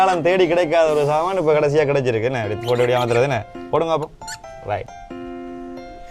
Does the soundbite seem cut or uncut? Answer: uncut